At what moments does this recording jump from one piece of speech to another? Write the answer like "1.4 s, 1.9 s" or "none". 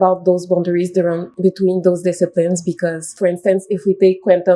1.3 s, 3.2 s